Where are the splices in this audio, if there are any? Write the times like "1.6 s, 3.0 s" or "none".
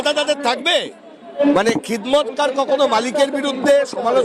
1.4 s